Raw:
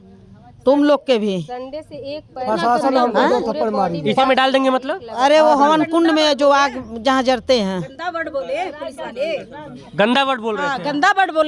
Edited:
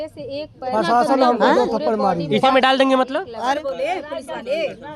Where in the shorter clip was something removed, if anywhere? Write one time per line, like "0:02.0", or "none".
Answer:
0:03.4

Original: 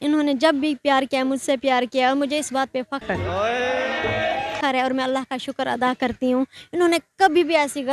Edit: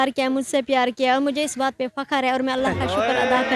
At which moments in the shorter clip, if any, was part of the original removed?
0:02.1

